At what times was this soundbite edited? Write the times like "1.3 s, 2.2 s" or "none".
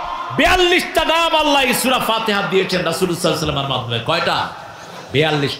none